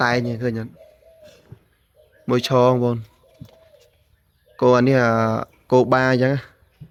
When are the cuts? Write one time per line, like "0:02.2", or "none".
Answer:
none